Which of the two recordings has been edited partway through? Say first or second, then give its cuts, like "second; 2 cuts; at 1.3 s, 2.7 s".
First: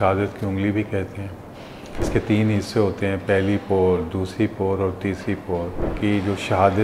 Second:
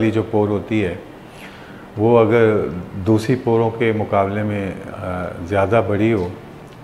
first; 2 cuts; at 2.1 s, 5.8 s